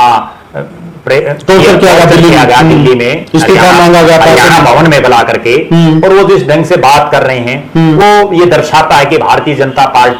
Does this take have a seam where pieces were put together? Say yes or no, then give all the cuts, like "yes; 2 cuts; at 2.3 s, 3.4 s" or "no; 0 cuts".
no; 0 cuts